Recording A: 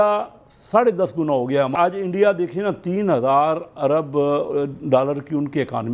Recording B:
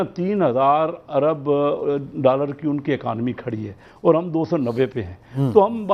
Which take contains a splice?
A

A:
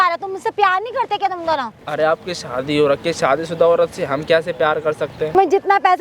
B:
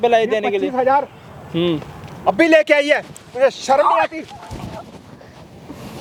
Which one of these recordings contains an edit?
A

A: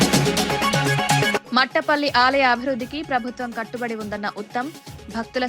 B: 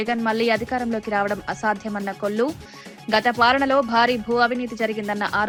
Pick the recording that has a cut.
A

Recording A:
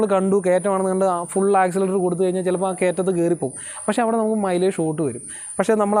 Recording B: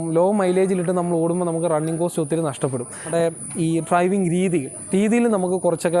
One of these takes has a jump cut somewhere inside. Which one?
B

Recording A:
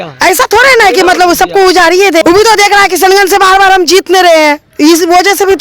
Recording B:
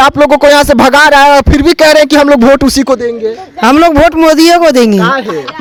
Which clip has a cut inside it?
A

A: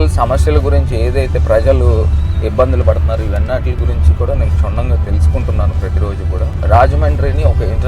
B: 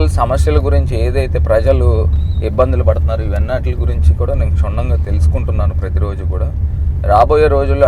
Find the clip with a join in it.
A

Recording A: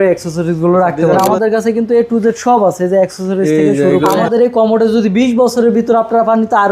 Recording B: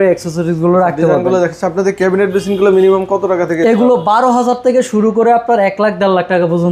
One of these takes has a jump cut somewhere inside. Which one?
A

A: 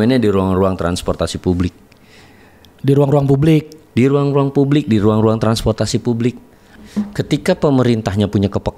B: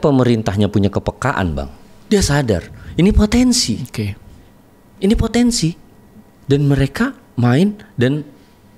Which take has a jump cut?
A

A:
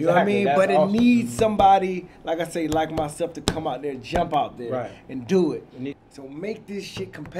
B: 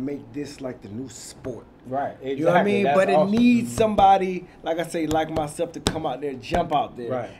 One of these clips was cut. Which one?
A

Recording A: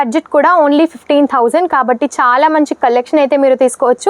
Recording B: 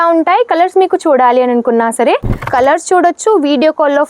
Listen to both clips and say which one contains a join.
B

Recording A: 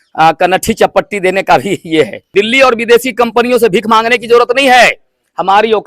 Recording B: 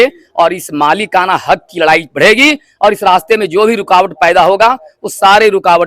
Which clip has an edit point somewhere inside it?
A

